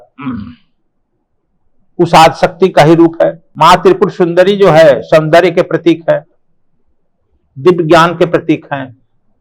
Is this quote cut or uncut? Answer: cut